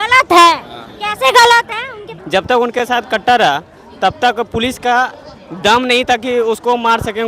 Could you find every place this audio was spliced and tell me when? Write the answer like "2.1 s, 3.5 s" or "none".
2.1 s